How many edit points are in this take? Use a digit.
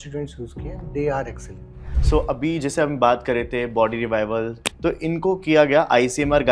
2